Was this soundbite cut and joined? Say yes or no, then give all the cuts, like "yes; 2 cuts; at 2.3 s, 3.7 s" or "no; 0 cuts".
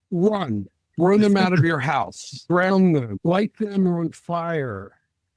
yes; 2 cuts; at 2.3 s, 3.1 s